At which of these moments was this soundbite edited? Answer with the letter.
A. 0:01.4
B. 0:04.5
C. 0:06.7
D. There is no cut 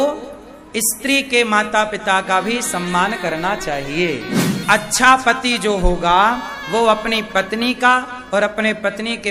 B